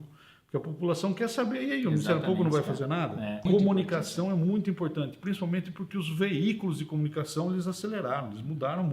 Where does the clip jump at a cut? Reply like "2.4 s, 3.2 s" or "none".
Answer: 3.4 s